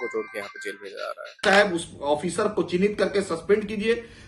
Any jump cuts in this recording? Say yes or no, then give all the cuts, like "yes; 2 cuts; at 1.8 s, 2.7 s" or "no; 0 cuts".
yes; 1 cut; at 1.4 s